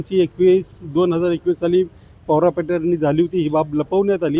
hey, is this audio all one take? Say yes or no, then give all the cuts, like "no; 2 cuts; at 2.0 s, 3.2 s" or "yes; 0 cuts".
yes; 0 cuts